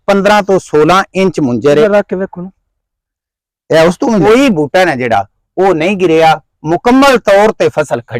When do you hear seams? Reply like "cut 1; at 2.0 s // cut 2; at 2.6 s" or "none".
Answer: cut 1; at 1.8 s // cut 2; at 4.2 s